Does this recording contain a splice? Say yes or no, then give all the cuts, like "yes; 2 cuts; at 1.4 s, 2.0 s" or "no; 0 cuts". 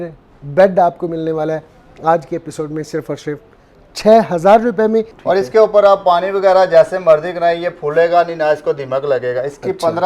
yes; 1 cut; at 5.1 s